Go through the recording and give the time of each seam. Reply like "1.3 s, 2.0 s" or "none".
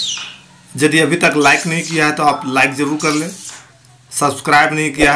none